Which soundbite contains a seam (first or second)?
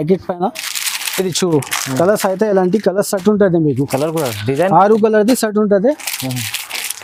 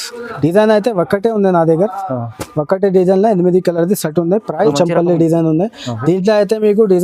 second